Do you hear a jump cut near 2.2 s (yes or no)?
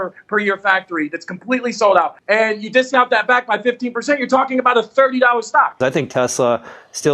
yes